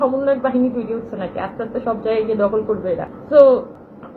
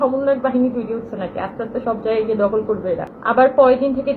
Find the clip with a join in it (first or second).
second